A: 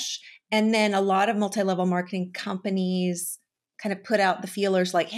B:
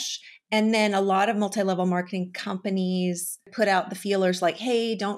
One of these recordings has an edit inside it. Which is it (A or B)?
B